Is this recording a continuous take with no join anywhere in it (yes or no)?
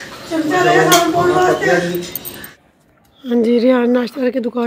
no